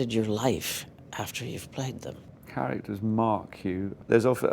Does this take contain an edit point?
yes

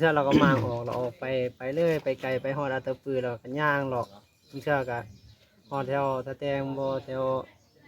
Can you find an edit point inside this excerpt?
no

